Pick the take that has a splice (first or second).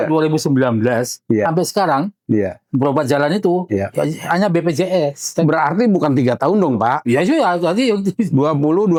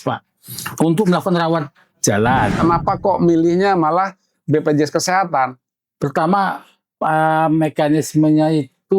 second